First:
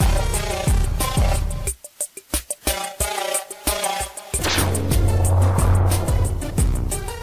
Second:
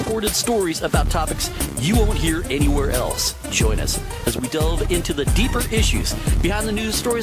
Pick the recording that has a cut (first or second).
second